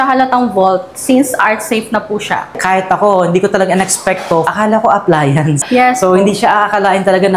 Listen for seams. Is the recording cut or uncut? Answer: cut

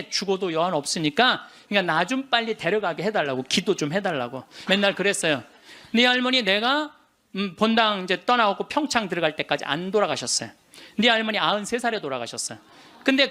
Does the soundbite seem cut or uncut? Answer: cut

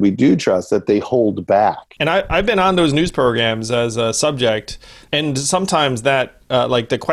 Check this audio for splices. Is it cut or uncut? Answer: cut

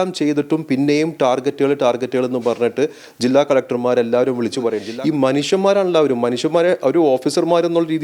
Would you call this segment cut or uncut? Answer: cut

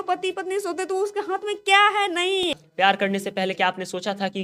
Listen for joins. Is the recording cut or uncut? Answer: cut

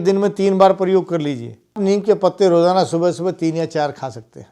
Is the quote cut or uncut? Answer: cut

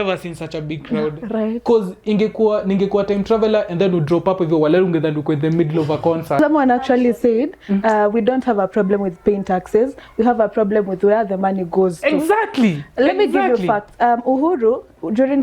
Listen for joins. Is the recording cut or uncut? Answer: cut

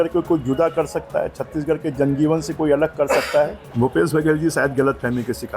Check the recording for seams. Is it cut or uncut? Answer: cut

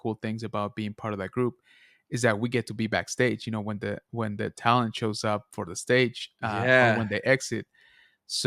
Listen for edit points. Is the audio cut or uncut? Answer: uncut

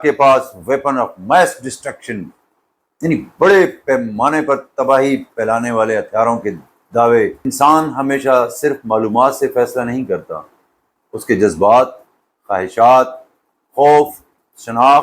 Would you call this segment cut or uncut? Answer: cut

